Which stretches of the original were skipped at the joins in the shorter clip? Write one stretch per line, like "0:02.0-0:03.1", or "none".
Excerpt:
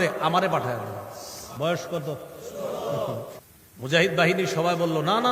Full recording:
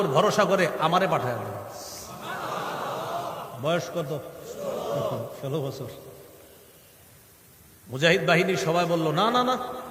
0:02.0-0:03.5
0:05.3-0:07.4